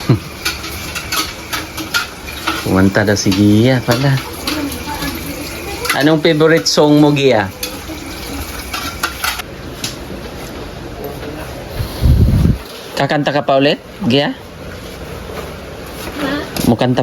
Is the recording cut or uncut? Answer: cut